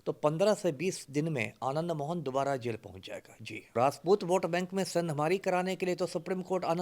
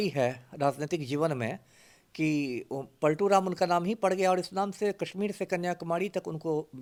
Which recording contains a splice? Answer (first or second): first